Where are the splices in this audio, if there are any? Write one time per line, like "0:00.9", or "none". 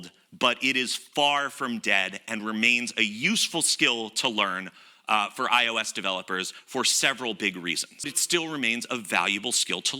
0:08.2